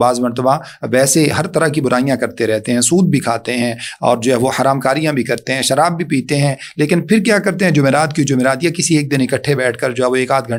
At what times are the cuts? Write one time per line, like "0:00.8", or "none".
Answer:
none